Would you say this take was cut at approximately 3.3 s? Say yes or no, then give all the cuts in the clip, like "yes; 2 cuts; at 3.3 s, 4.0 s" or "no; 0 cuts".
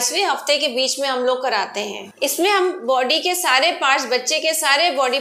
no; 1 cut; at 2.0 s